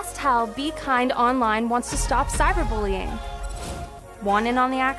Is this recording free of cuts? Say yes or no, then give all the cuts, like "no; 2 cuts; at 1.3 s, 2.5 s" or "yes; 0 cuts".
yes; 0 cuts